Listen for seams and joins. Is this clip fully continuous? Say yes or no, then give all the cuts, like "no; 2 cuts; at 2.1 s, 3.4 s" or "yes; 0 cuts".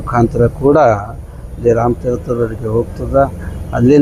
yes; 0 cuts